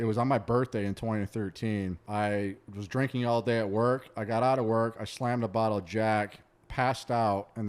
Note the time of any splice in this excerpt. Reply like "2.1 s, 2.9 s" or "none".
2.0 s